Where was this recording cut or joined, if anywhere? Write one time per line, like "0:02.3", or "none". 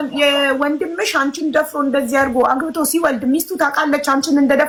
none